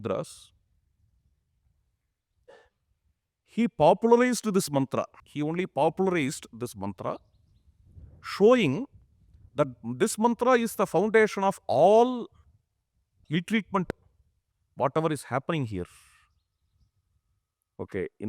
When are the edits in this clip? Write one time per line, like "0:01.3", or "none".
0:05.2
0:13.2

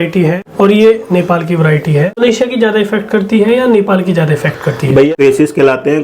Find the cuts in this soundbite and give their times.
0:02.2
0:05.1

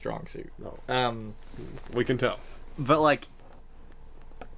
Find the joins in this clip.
none

